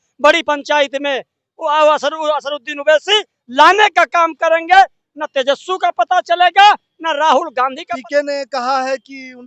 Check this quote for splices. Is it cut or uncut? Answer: cut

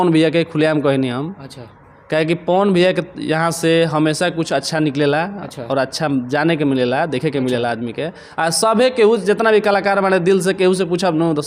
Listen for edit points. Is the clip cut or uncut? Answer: uncut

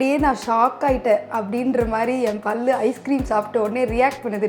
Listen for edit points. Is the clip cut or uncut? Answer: uncut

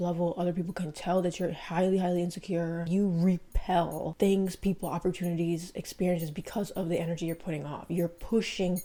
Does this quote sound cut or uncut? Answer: uncut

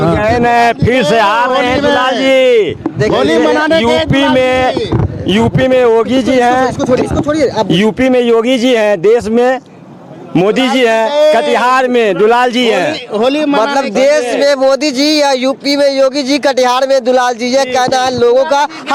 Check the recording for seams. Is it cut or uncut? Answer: uncut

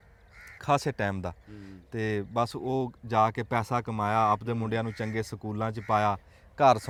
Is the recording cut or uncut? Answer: uncut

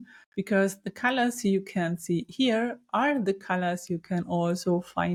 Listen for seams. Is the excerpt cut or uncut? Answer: uncut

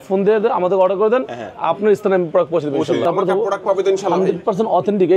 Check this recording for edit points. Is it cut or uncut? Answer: cut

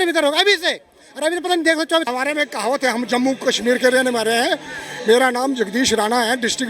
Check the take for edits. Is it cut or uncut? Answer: cut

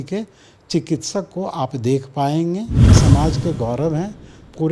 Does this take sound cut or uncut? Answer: cut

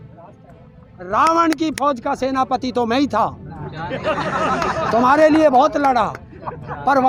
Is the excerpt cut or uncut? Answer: uncut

